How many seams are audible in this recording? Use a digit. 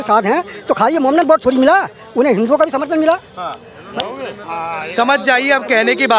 0